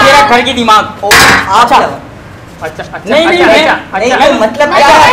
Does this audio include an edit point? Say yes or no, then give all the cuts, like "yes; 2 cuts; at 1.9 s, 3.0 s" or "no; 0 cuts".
no; 0 cuts